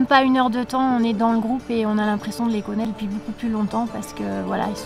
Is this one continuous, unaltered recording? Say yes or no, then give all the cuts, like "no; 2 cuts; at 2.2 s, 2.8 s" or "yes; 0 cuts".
no; 1 cut; at 2.8 s